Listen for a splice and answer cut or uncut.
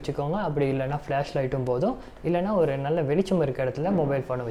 uncut